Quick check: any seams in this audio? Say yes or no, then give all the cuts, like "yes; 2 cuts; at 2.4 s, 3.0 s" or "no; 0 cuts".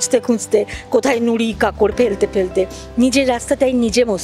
no; 0 cuts